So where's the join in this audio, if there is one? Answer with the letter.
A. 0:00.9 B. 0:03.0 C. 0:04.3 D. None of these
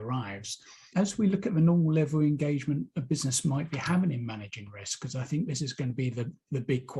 A